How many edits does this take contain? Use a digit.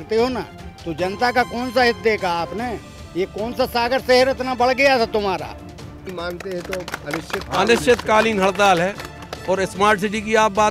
1